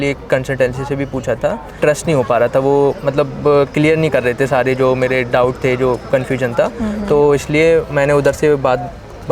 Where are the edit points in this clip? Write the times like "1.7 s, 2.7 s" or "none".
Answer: 1.7 s